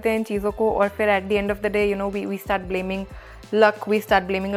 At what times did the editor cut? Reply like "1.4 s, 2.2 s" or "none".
none